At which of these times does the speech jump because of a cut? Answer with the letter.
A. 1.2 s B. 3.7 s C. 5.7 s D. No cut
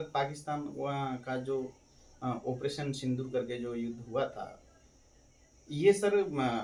D